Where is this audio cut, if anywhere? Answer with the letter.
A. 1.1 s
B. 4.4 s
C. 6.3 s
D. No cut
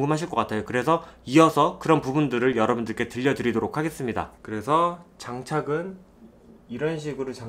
B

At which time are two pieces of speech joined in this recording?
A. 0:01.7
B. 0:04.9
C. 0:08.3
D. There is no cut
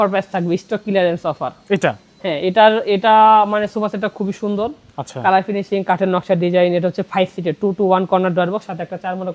D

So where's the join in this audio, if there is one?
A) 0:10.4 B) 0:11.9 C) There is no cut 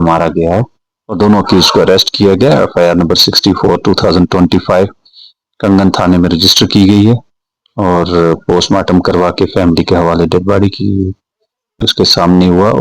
B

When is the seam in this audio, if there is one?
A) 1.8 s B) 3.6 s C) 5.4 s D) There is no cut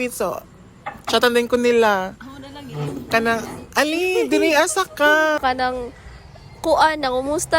C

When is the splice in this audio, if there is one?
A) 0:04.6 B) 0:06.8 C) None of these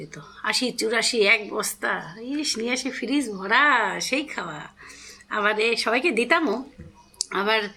C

